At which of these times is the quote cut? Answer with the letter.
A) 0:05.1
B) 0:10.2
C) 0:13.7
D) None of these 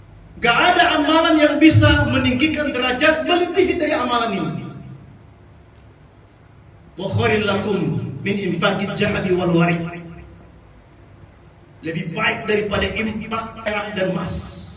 C